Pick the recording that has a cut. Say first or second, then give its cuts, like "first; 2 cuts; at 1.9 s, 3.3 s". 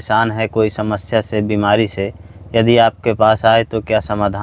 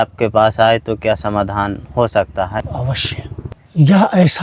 second; 1 cut; at 2.7 s